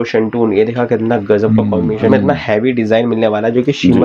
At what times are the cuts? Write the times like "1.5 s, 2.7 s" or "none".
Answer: 2.1 s

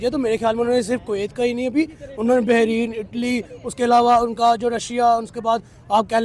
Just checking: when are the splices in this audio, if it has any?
none

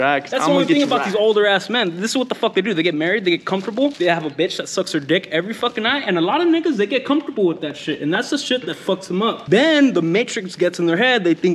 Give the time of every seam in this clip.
none

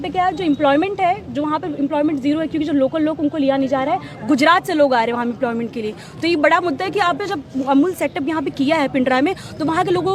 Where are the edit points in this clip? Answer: none

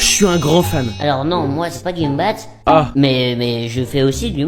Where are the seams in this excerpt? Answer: 2.9 s

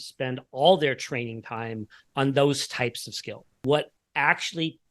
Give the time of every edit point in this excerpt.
3.6 s

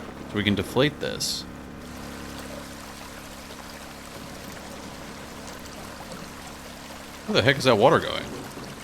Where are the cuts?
1.9 s

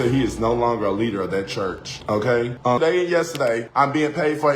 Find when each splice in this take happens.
2.8 s

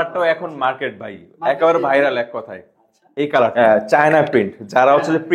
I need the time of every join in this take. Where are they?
3.5 s

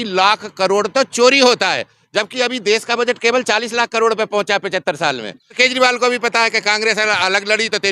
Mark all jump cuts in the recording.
5.5 s

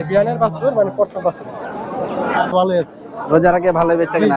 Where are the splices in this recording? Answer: 2.5 s

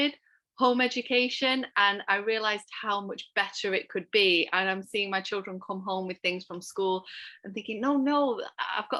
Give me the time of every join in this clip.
none

